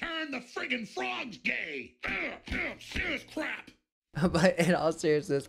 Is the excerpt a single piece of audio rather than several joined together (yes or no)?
yes